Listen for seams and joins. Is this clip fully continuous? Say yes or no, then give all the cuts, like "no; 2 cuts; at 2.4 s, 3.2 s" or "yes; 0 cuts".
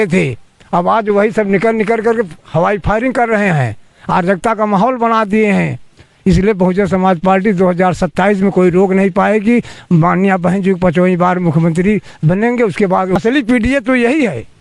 no; 1 cut; at 13.1 s